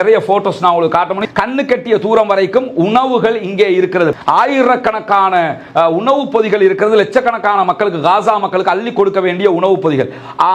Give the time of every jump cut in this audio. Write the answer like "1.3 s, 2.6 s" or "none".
1.2 s, 4.1 s